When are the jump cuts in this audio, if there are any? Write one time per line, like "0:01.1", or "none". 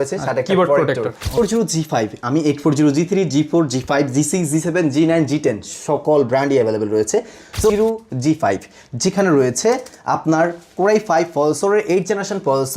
0:01.4
0:07.7